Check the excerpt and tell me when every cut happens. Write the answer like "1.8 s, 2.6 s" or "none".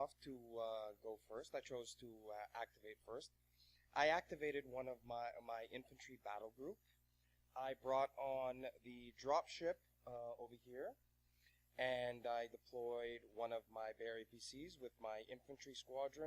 14.2 s